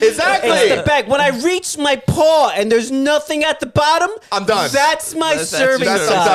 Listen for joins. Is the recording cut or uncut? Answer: uncut